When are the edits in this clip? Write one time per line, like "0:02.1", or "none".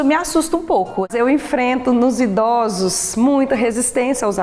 0:01.1